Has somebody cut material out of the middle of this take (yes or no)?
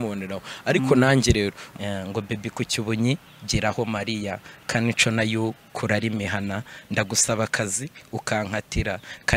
yes